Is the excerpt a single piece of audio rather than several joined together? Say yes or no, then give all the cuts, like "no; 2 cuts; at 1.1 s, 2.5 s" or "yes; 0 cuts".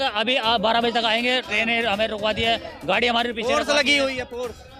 yes; 0 cuts